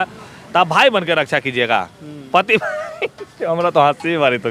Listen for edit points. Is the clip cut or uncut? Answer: uncut